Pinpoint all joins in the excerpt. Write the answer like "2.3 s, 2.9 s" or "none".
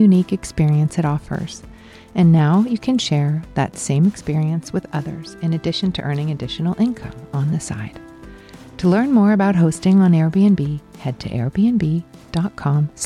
none